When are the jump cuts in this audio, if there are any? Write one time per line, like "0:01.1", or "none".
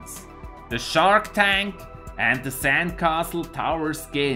0:01.0